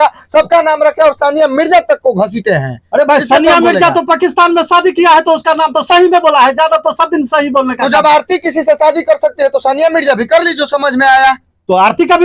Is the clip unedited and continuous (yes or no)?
yes